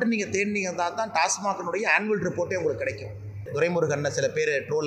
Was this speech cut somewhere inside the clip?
yes; 1 cut; at 3.5 s

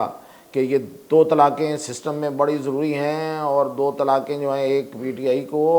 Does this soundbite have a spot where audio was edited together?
no; 0 cuts

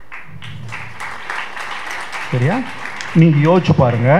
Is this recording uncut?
yes; 0 cuts

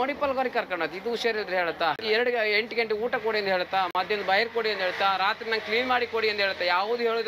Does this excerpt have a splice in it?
yes; 1 cut; at 2.0 s

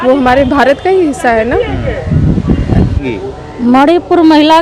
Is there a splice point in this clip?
yes; 1 cut; at 3.0 s

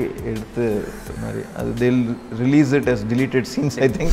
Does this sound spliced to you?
no; 0 cuts

